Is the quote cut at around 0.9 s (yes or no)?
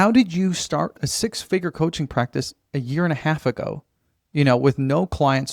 yes